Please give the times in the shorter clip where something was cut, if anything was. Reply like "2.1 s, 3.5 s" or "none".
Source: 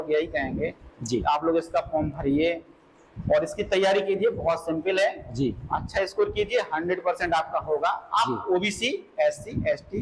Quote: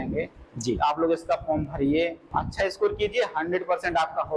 2.2 s